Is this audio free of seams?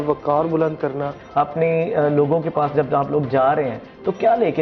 no; 1 cut; at 1.1 s

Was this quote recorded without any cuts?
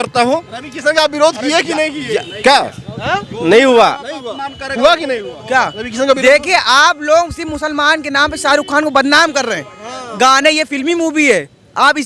yes; 0 cuts

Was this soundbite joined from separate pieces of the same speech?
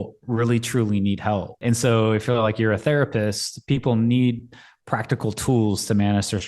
yes; 1 cut; at 1.6 s

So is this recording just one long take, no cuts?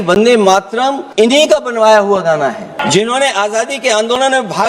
no; 2 cuts; at 1.0 s, 2.8 s

